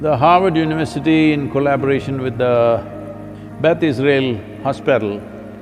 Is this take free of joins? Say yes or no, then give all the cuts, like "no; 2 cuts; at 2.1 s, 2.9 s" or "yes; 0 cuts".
yes; 0 cuts